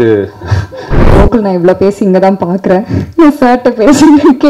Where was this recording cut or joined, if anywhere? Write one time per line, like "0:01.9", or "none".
0:01.1

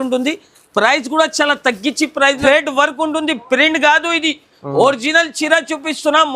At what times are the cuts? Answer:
0:02.4

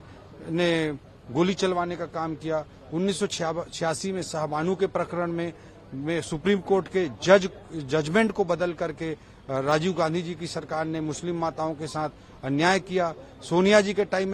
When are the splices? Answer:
none

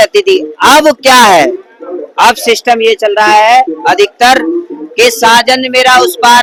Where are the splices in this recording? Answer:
none

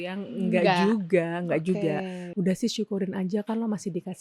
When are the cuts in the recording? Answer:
0:02.2

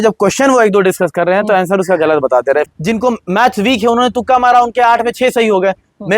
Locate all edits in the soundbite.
0:02.7

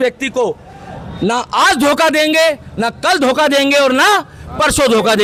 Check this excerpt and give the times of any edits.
none

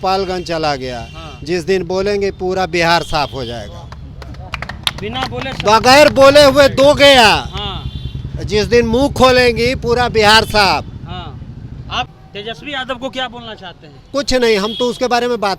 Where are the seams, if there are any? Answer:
0:12.1

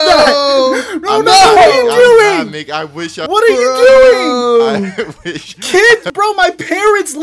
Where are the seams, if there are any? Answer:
none

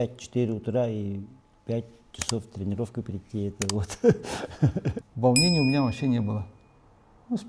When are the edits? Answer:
0:05.0

